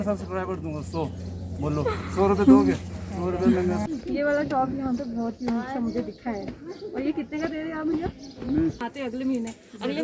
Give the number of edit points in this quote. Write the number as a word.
two